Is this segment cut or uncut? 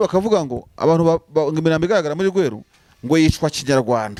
uncut